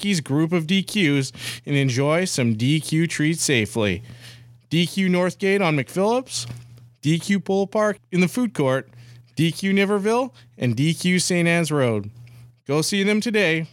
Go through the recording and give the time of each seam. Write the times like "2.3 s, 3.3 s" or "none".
8.0 s